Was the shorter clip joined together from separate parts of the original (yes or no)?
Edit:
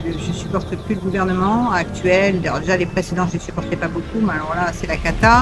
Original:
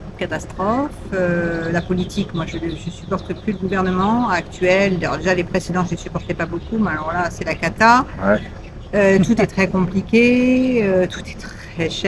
no